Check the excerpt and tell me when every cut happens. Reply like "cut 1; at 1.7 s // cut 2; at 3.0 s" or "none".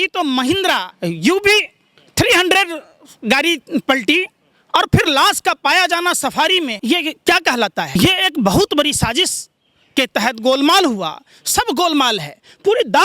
cut 1; at 0.9 s // cut 2; at 6.8 s // cut 3; at 7.9 s